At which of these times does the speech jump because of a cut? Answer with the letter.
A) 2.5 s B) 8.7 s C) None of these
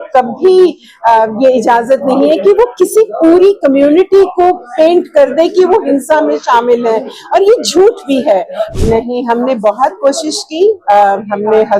B